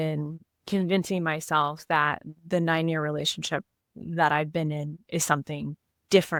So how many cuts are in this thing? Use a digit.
0